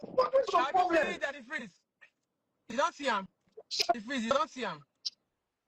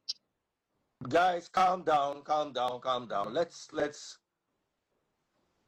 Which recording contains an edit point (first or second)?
first